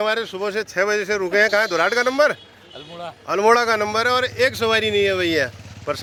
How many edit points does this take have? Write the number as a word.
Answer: zero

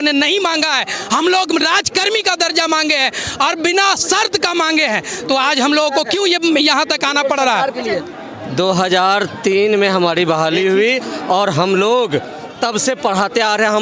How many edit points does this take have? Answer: one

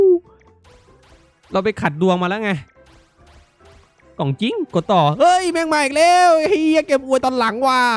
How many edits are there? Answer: zero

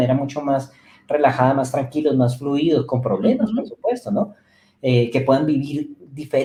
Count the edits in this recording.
zero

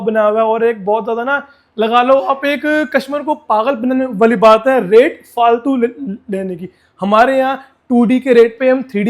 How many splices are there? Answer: zero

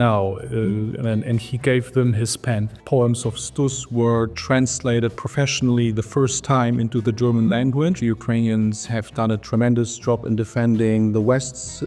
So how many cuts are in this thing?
two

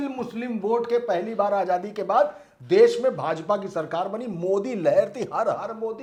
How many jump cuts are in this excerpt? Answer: zero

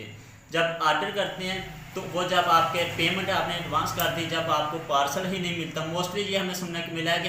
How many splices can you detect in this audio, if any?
zero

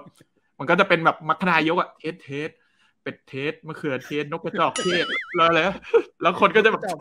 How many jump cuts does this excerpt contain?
zero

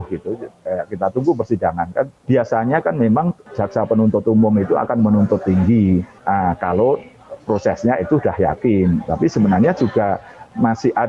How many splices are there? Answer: three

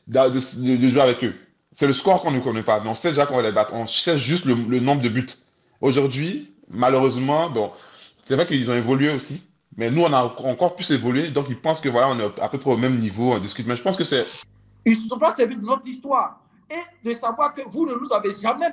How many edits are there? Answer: one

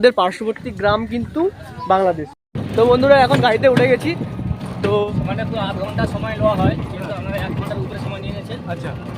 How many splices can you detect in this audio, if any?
two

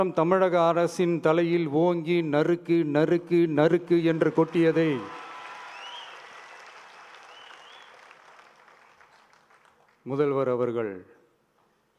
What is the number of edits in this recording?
zero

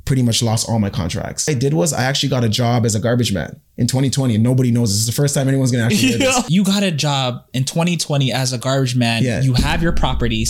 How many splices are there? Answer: two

